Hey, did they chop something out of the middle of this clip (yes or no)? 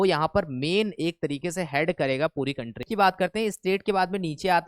yes